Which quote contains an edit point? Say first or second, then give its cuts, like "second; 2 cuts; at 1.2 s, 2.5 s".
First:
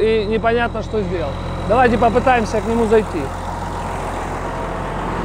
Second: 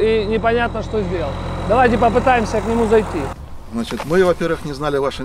second; 1 cut; at 3.4 s